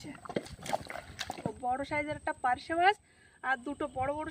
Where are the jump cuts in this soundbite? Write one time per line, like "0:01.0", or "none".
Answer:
0:01.6